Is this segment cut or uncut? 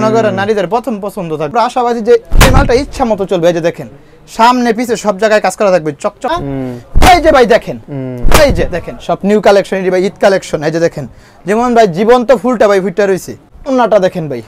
cut